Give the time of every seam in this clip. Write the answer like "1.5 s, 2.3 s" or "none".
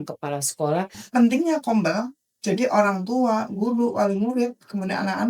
1.0 s